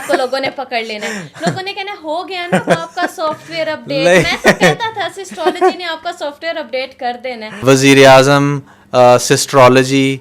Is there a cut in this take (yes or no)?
yes